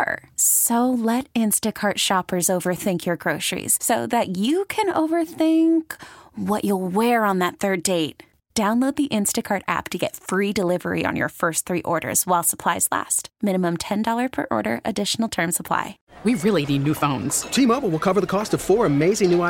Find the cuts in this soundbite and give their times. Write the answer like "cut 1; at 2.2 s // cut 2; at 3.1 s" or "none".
cut 1; at 16.0 s

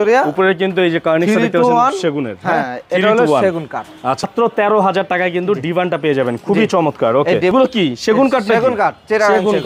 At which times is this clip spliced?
cut 1; at 4.3 s // cut 2; at 7.5 s

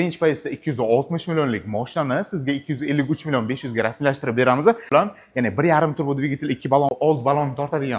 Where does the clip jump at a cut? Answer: cut 1; at 4.8 s // cut 2; at 6.9 s

